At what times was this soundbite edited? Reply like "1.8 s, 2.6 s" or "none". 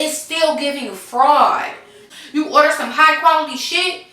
2.1 s